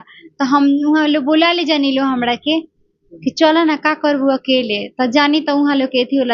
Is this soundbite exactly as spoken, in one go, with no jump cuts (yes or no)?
yes